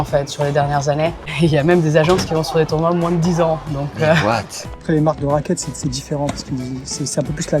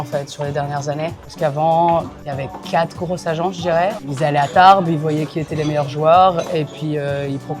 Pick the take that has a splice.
first; 2 cuts; at 1.3 s, 4.6 s

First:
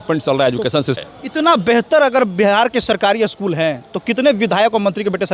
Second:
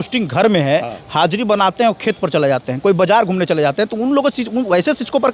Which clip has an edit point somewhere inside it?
first; 1 cut; at 1.0 s

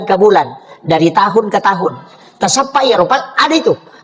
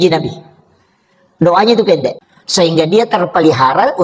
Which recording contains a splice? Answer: second; 1 cut; at 2.1 s

